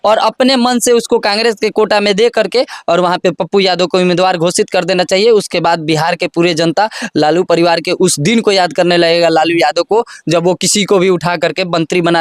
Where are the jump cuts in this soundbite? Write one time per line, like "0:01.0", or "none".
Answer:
none